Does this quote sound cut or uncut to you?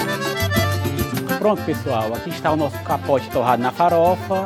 uncut